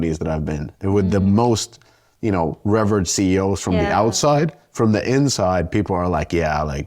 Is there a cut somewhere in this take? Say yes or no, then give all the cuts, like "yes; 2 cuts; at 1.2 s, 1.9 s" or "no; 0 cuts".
no; 0 cuts